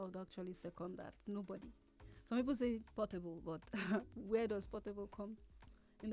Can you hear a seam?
no; 0 cuts

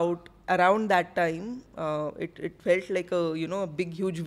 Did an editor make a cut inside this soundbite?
no; 0 cuts

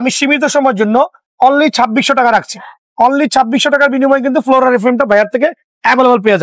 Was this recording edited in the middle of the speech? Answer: no; 0 cuts

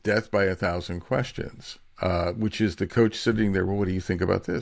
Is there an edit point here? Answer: no; 0 cuts

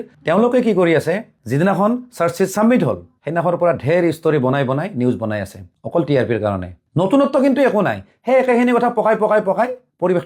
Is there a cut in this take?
no; 0 cuts

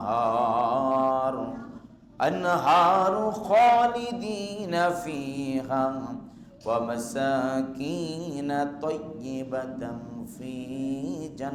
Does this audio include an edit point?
no; 0 cuts

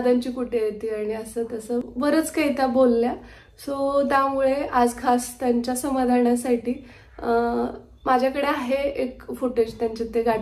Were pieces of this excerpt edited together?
no; 0 cuts

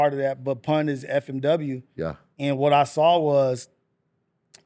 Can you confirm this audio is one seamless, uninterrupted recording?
yes; 0 cuts

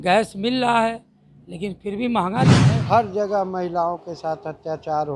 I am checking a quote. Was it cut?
yes; 1 cut; at 2.7 s

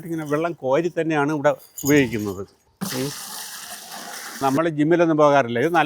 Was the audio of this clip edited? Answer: yes; 2 cuts; at 2.6 s, 4.4 s

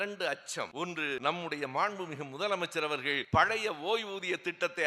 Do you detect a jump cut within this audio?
yes; 2 cuts; at 1.0 s, 3.2 s

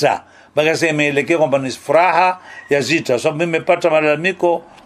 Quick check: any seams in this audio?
no; 0 cuts

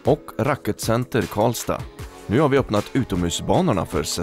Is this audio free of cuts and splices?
yes; 0 cuts

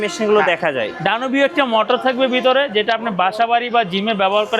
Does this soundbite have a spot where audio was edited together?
no; 0 cuts

